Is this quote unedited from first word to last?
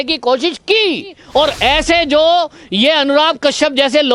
no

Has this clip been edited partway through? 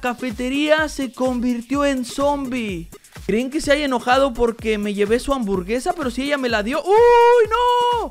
yes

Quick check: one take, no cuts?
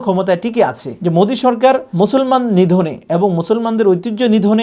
no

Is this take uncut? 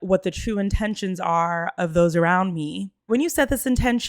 no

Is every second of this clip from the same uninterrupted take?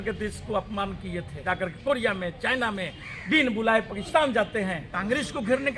no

